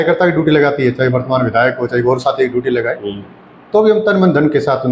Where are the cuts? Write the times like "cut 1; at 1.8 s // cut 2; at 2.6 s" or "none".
none

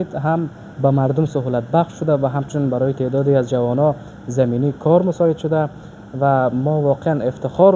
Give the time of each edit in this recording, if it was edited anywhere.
none

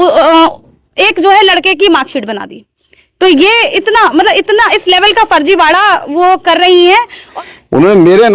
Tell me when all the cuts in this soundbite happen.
cut 1; at 7.3 s

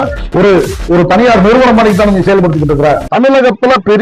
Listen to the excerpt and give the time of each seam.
cut 1; at 3.0 s

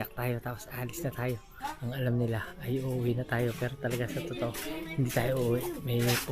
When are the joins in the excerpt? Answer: cut 1; at 1.5 s

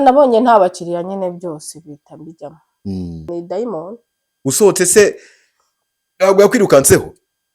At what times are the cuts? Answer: cut 1; at 3.3 s

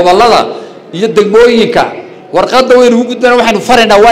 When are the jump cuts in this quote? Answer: none

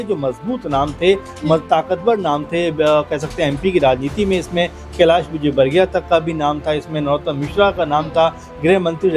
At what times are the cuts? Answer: none

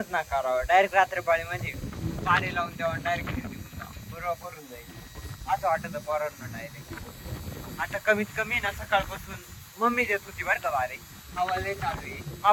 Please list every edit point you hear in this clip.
none

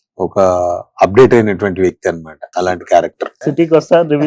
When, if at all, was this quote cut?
cut 1; at 2.3 s // cut 2; at 3.3 s

